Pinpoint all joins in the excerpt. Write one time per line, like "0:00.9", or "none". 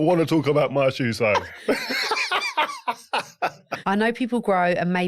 0:01.5
0:03.7